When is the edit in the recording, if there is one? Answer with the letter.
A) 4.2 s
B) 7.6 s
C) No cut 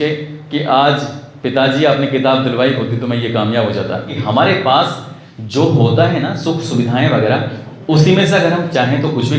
A